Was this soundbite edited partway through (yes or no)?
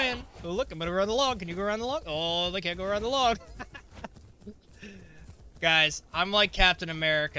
no